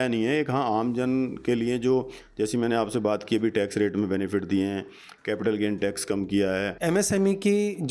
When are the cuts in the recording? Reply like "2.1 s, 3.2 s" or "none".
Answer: 6.7 s